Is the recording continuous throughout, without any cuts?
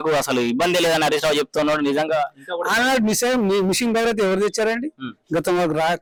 yes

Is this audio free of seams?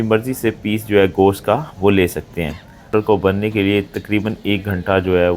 no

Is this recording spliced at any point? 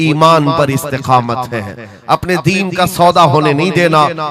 no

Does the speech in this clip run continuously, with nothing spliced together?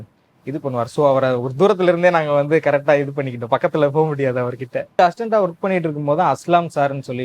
no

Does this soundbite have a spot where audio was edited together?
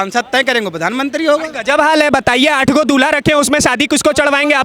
no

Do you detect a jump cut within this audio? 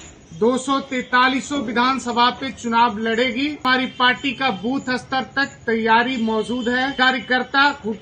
yes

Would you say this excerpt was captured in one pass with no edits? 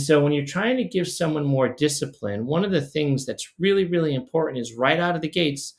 yes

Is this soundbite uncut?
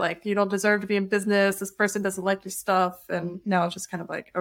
yes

